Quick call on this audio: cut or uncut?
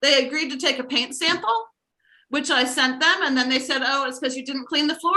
uncut